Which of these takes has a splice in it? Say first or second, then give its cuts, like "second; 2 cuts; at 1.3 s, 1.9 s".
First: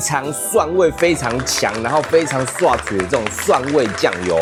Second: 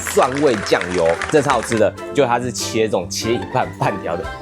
second; 1 cut; at 2.0 s